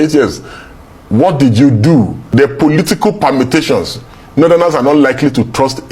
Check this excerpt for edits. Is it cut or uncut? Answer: cut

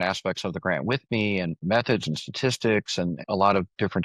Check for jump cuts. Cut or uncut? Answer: uncut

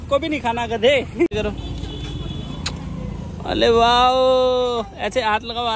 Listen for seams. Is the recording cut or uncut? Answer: cut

